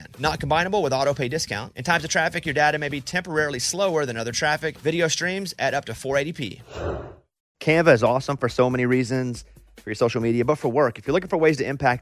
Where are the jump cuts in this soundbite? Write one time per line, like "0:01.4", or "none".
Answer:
0:07.5

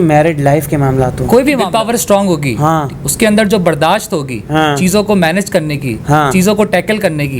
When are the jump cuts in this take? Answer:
0:01.7

